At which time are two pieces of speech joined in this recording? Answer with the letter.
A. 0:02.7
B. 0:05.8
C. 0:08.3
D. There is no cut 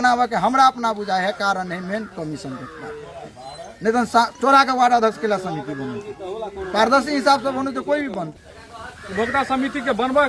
C